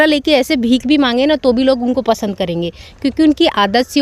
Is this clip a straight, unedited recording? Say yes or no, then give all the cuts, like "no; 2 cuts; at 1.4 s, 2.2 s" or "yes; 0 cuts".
yes; 0 cuts